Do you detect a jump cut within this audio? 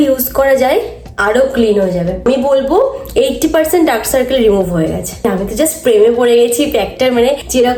no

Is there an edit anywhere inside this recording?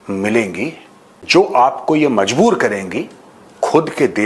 no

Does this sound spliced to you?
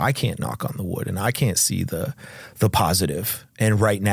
no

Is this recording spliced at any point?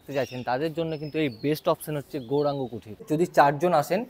yes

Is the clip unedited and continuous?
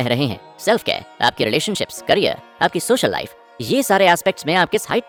yes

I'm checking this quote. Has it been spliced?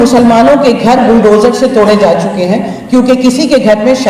no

